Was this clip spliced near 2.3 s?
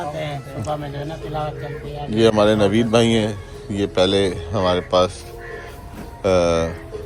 no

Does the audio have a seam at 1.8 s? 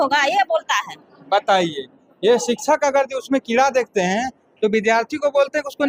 no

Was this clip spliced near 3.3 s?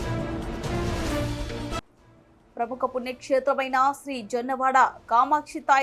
no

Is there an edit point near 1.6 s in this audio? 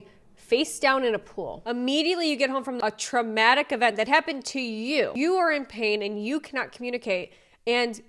yes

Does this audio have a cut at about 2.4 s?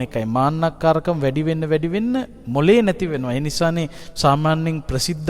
yes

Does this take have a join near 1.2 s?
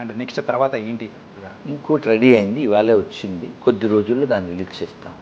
no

